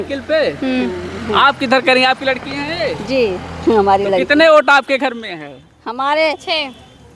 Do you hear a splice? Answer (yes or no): no